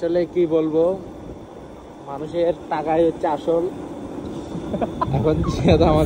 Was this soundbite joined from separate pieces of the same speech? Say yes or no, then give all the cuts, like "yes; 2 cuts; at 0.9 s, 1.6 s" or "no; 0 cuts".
no; 0 cuts